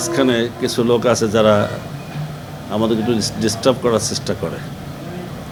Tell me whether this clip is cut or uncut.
uncut